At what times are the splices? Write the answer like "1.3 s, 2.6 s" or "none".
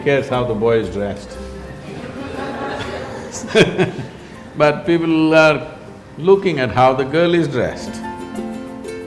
none